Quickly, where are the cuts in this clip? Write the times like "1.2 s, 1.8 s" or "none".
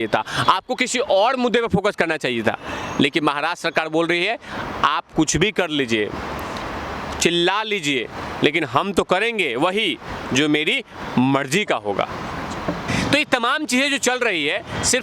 12.8 s